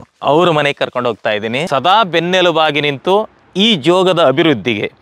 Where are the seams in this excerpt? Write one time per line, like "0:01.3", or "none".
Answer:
0:01.6